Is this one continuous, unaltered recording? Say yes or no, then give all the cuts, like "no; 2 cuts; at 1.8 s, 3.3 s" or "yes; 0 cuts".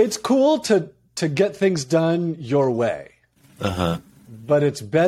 yes; 0 cuts